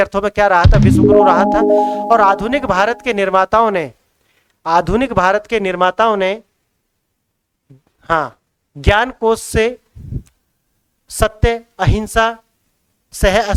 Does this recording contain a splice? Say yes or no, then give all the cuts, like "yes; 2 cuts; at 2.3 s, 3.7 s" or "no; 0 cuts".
no; 0 cuts